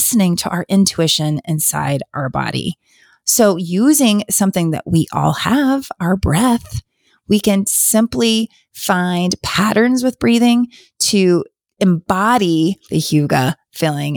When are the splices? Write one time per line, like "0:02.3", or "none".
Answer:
0:12.8